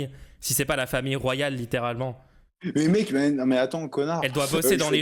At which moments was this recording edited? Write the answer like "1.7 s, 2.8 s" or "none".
none